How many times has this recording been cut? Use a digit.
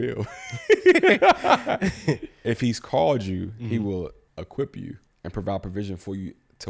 2